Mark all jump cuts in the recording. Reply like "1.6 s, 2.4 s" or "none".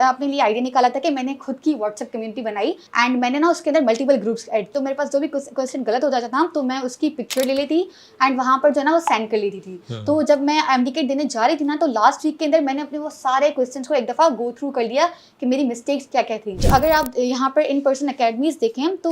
2.8 s, 4.7 s, 16.6 s